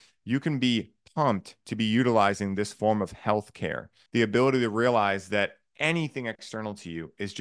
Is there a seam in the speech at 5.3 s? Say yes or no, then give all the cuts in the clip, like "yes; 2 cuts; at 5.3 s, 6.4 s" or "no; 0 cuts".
no; 1 cut; at 4.1 s